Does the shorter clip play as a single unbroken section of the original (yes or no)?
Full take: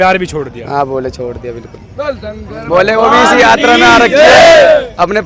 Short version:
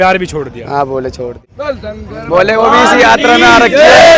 no